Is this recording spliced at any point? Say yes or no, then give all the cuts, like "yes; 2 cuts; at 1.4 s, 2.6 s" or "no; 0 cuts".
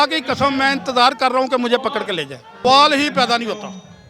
yes; 1 cut; at 2.6 s